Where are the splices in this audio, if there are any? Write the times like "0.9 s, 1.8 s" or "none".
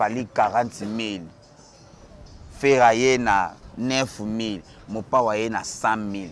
none